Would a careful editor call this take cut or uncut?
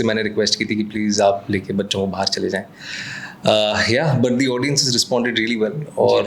uncut